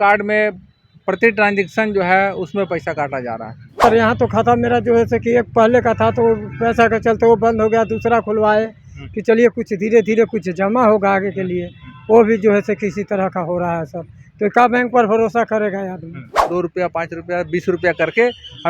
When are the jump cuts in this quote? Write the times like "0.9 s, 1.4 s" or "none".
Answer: 3.8 s, 16.5 s